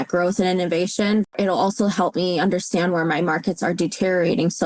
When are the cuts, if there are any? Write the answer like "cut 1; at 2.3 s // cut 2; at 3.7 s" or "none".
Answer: cut 1; at 1.2 s